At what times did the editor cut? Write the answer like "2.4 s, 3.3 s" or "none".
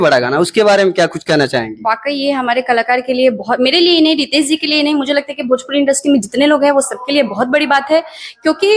none